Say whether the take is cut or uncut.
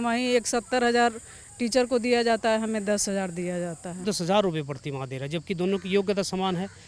cut